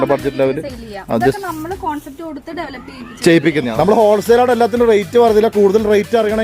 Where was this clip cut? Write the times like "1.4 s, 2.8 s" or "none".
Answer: 3.7 s